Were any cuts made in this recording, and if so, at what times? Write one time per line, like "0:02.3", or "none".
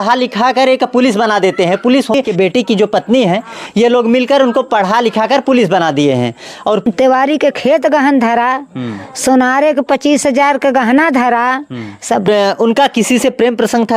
0:02.1
0:06.8
0:12.3